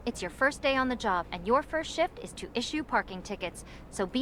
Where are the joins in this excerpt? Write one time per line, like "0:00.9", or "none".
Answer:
none